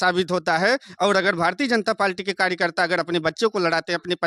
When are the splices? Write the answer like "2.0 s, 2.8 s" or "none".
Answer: none